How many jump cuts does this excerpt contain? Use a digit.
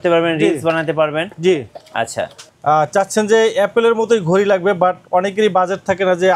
1